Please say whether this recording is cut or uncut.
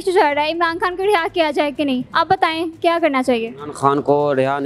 uncut